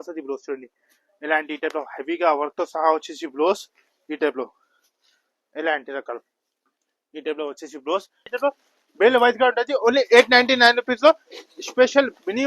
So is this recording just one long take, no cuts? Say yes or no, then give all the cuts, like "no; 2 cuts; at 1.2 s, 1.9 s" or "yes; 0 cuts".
no; 1 cut; at 8.3 s